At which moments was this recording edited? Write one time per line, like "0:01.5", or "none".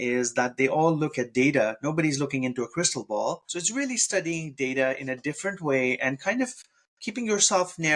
0:03.5